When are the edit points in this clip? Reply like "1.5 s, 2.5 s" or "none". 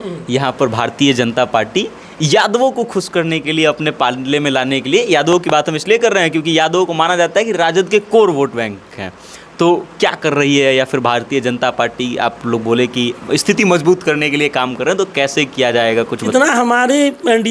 16.3 s